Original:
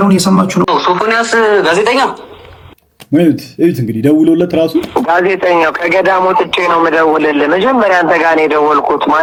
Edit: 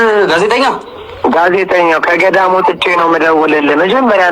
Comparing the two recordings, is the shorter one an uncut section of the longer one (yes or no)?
no